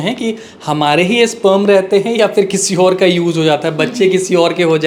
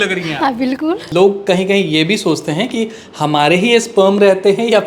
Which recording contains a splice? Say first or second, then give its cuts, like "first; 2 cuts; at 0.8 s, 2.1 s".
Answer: second; 1 cut; at 1.1 s